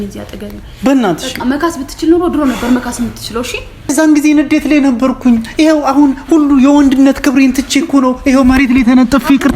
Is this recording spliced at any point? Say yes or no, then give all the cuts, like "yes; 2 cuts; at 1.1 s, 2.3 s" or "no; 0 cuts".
yes; 1 cut; at 3.9 s